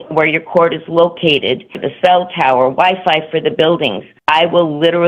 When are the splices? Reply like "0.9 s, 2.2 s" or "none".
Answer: 1.8 s, 4.1 s

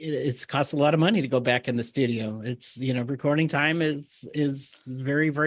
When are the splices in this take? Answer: none

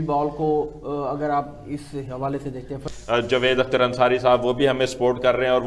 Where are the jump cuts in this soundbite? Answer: 2.8 s

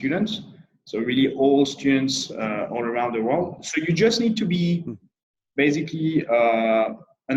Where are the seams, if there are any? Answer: none

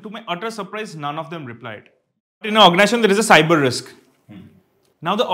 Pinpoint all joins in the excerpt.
2.5 s

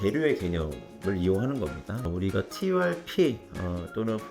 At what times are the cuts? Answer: 2.0 s

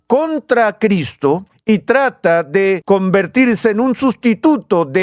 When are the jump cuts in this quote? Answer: 1.5 s, 2.8 s

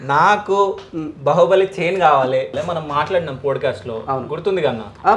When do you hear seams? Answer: 2.6 s

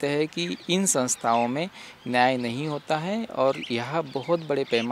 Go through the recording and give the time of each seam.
none

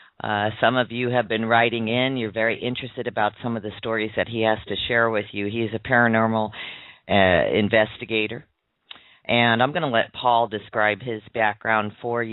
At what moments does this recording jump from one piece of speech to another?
11.3 s

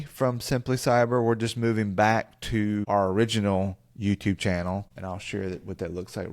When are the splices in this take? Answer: 2.8 s, 4.9 s

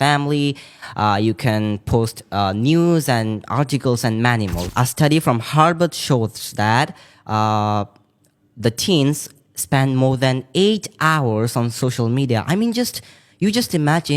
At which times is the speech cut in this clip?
4.6 s

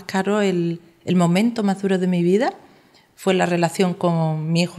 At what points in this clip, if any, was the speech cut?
none

